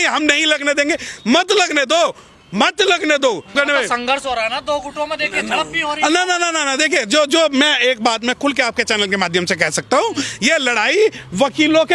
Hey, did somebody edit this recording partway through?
no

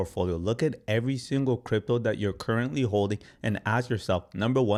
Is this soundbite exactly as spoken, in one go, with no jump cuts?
yes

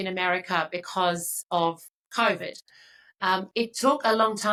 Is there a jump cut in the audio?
no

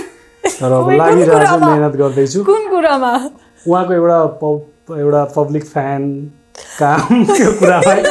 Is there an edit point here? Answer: no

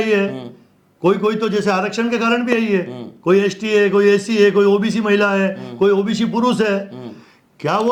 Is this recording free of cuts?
yes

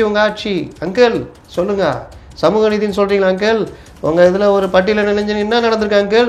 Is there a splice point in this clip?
yes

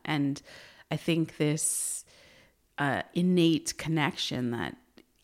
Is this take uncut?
yes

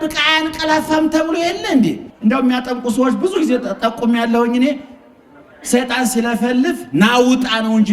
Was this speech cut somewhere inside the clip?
yes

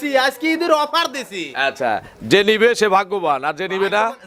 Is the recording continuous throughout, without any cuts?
yes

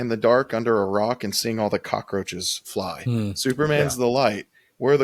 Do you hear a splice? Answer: no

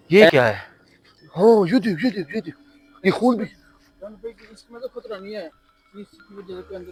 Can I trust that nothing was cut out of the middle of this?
yes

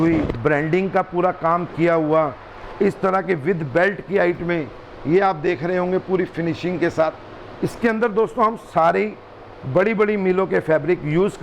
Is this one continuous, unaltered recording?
yes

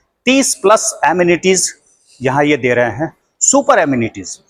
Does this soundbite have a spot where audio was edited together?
no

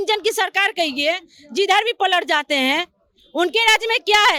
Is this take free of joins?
yes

